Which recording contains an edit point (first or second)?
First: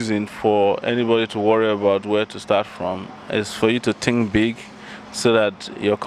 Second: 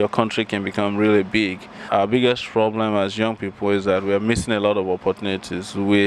second